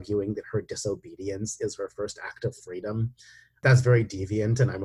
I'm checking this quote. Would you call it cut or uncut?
cut